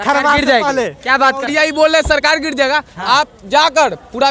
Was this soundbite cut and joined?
yes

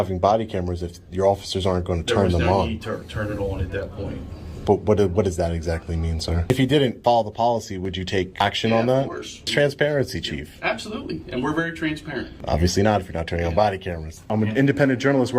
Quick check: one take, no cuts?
no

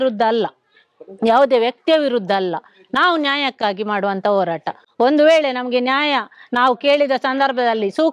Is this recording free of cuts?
yes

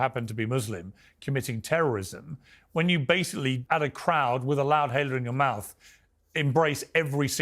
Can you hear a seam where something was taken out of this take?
yes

